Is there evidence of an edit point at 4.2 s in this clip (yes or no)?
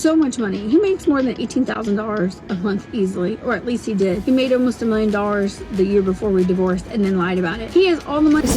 yes